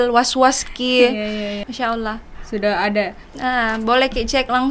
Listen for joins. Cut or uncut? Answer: cut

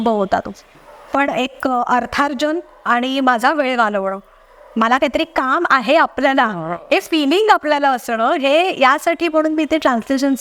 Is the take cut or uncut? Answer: cut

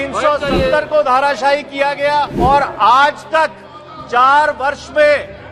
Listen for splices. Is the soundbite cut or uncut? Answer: cut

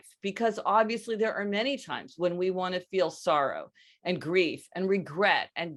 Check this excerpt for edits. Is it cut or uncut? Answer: uncut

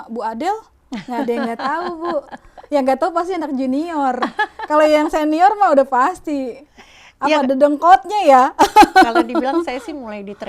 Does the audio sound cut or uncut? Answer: uncut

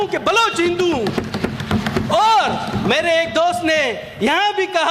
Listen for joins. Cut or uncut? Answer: uncut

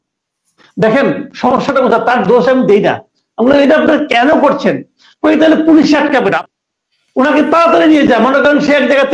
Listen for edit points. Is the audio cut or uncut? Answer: cut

